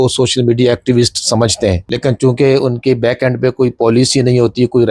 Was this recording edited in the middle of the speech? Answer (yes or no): yes